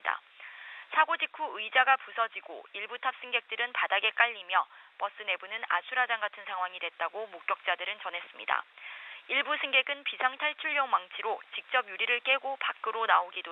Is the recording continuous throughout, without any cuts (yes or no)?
yes